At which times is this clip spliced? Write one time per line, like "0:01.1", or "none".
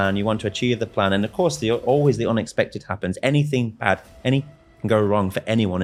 none